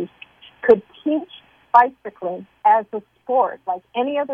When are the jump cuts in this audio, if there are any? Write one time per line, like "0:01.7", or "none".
0:02.5